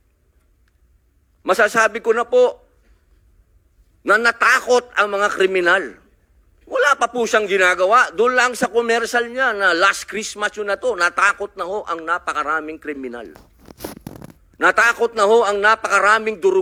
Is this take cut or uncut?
uncut